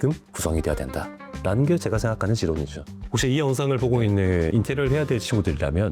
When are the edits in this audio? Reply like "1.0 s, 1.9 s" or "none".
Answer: 3.0 s